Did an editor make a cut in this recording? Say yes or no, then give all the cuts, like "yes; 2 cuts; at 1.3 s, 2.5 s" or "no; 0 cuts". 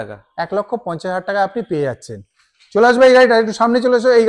no; 0 cuts